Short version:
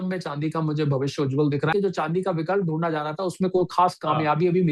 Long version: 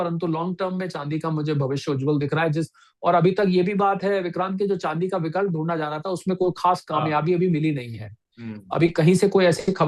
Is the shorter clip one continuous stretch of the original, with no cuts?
no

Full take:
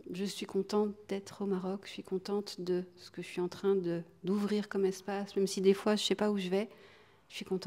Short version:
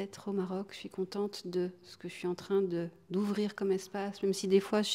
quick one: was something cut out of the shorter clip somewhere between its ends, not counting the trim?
no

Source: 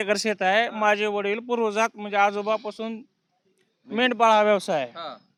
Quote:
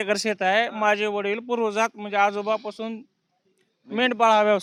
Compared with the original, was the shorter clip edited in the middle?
no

